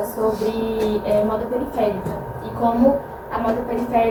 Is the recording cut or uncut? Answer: uncut